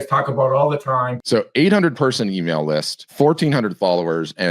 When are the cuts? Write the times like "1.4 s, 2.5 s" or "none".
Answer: 1.2 s, 3.0 s